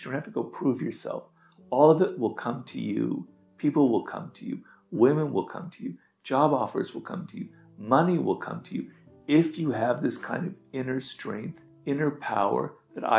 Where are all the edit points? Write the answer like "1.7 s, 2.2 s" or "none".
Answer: 11.6 s